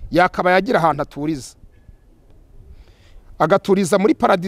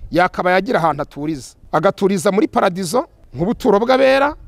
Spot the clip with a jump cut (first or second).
second